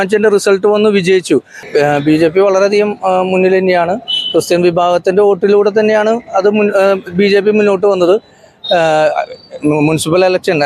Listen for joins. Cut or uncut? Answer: cut